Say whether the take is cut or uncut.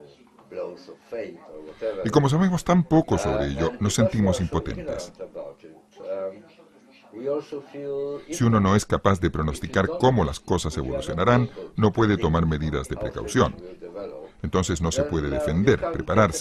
cut